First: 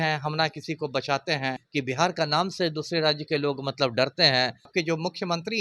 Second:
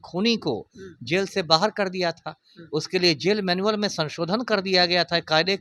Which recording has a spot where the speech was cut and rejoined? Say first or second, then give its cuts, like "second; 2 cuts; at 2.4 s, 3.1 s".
first; 2 cuts; at 1.6 s, 4.7 s